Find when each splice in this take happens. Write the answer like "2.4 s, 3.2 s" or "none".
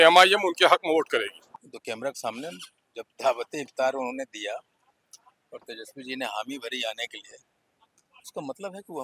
1.4 s